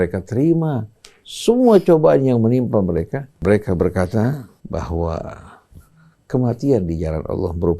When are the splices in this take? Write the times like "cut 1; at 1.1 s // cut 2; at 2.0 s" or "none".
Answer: cut 1; at 3.4 s // cut 2; at 4.5 s